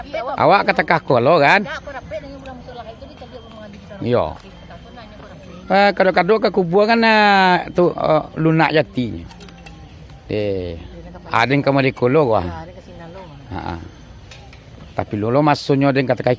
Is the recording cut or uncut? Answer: uncut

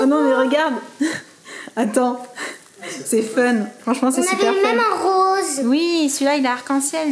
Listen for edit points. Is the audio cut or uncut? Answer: uncut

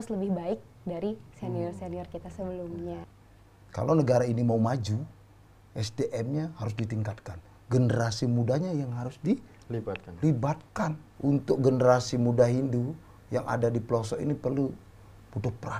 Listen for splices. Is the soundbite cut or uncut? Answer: cut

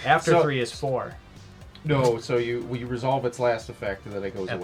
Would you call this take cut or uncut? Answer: uncut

